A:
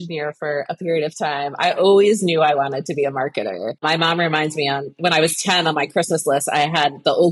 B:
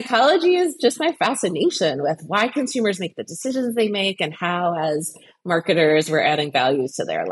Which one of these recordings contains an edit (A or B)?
A